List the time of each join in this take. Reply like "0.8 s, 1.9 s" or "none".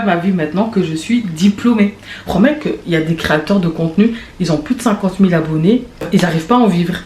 2.3 s, 6.1 s

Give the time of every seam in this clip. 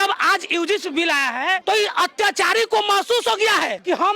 1.6 s

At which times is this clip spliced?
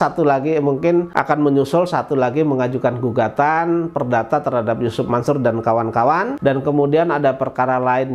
1.1 s, 6.3 s

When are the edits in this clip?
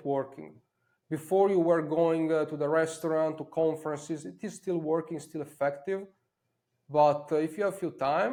none

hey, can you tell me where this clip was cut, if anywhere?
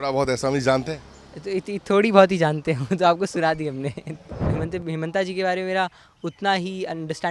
4.4 s

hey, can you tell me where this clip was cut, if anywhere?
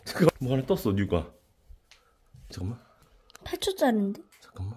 2.7 s

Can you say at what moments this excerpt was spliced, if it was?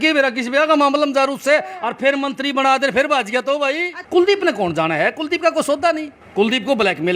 3.9 s, 6.1 s

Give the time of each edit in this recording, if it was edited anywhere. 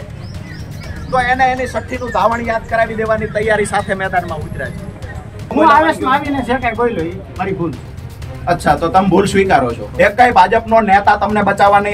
5.5 s, 9.8 s

